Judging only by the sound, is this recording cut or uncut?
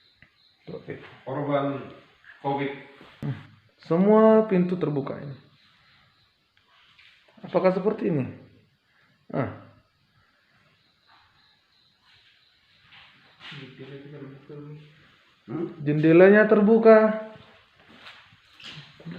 cut